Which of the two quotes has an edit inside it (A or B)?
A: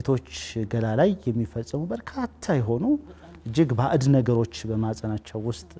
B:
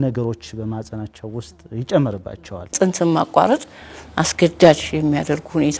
B